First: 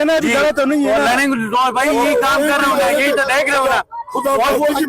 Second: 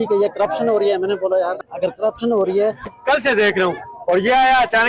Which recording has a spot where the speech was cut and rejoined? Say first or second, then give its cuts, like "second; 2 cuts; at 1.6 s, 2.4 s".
second; 2 cuts; at 1.6 s, 3.0 s